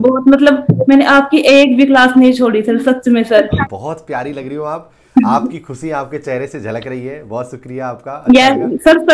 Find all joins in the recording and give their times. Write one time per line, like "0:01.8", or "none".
0:03.5